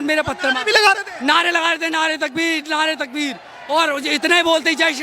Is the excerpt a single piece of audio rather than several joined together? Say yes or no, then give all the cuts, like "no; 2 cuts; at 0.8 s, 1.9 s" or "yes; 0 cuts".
yes; 0 cuts